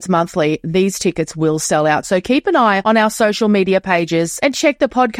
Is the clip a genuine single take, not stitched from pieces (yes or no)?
yes